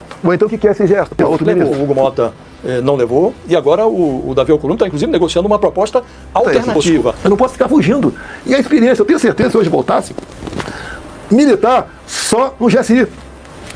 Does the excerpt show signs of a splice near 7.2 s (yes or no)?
yes